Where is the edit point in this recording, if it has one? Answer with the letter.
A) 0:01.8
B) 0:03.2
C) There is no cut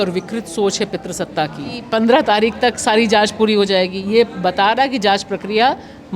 A